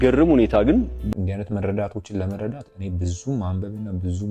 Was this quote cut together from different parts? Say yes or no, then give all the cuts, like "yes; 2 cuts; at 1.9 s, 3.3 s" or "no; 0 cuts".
yes; 1 cut; at 1.0 s